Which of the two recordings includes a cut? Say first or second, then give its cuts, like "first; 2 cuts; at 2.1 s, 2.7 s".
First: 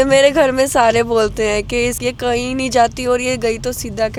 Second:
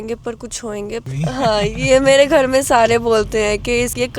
second; 1 cut; at 1.0 s